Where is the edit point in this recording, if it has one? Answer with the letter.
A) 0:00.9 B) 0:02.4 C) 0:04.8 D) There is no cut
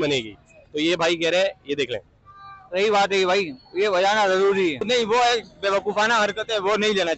C